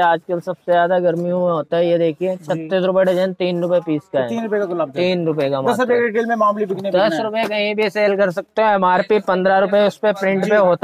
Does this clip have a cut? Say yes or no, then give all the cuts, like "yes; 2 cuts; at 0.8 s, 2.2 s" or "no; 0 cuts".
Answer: no; 0 cuts